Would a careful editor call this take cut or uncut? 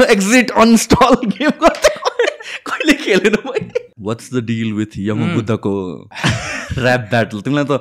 cut